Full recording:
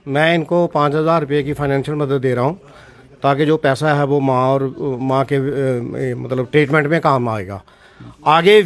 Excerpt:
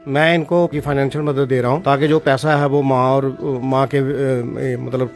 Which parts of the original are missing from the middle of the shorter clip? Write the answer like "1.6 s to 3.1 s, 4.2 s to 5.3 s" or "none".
0.7 s to 1.4 s, 2.5 s to 3.2 s